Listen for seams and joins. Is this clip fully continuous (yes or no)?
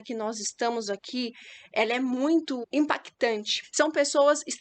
no